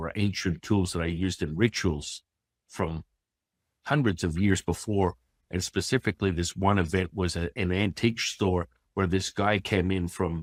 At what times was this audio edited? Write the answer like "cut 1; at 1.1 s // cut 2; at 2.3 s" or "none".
none